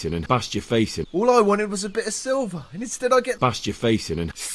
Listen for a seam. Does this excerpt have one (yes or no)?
yes